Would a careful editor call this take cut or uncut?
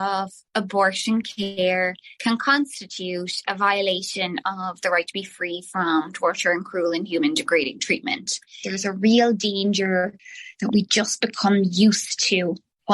cut